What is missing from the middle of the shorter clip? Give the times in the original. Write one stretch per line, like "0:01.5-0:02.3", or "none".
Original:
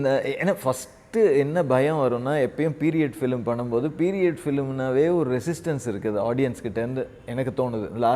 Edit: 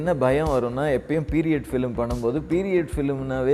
none